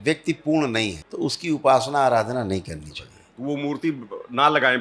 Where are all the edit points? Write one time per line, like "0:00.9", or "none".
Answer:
0:01.0